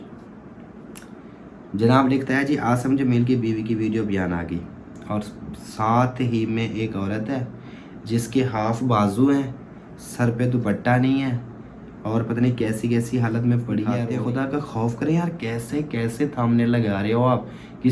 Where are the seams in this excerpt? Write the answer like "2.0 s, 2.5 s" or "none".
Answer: 14.1 s